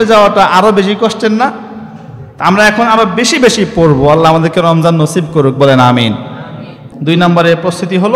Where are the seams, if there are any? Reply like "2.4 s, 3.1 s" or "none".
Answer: 6.9 s